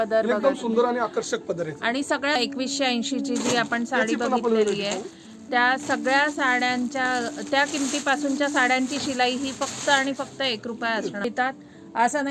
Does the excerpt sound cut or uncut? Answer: cut